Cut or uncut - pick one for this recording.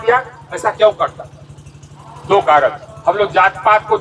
cut